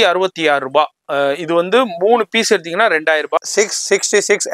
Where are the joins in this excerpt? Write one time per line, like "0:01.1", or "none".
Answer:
0:03.4

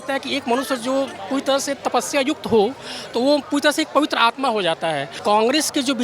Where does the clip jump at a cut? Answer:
0:05.1

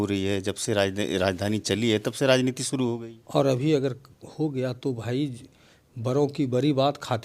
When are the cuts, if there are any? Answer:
0:03.1

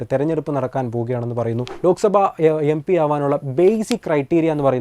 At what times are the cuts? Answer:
0:01.7

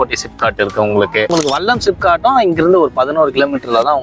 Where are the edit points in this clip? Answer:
0:01.3

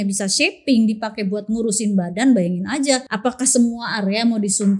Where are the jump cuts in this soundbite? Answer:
0:03.1

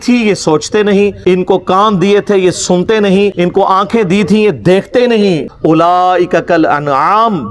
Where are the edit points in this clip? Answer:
0:01.2
0:03.3
0:05.5

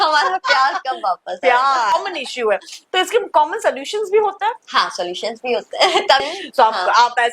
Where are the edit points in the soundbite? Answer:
0:01.9
0:06.2

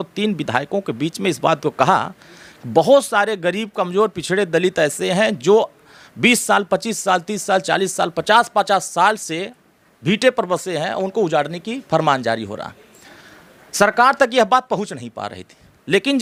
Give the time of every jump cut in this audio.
none

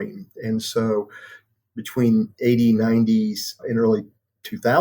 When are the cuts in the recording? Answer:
0:03.6

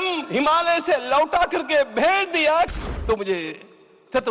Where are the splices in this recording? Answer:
0:02.7

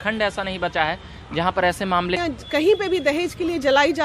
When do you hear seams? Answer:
0:02.2

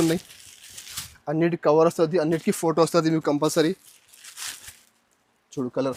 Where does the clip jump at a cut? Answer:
none

